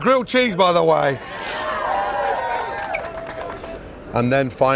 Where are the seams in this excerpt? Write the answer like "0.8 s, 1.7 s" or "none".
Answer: none